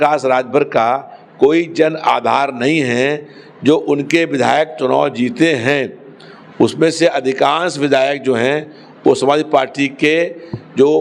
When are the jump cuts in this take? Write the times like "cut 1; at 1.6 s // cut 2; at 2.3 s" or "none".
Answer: none